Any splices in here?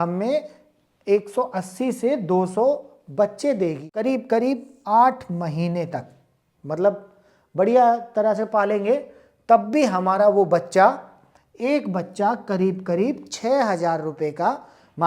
yes; 1 cut; at 3.9 s

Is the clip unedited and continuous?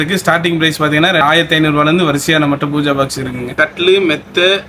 no; 2 cuts; at 1.2 s, 3.5 s

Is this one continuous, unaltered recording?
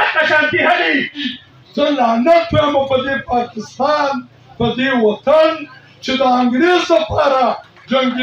no; 1 cut; at 1.3 s

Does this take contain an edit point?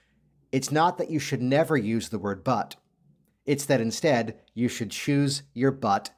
no; 0 cuts

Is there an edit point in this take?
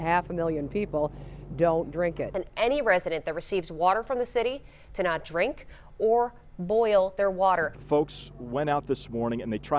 yes; 2 cuts; at 2.4 s, 7.8 s

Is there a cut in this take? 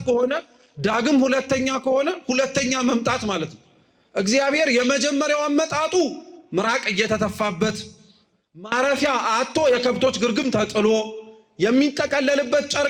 no; 0 cuts

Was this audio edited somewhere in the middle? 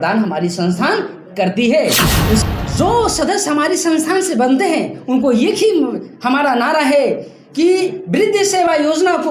yes; 1 cut; at 2.4 s

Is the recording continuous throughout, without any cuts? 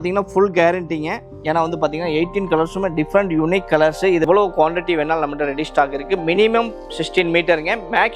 no; 1 cut; at 4.2 s

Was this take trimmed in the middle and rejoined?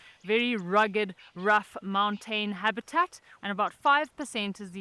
yes; 1 cut; at 3.3 s

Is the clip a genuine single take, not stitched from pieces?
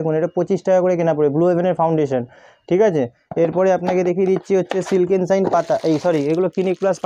yes; 0 cuts

